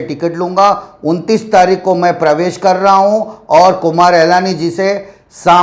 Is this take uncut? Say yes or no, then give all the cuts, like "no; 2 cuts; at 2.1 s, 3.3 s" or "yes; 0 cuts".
yes; 0 cuts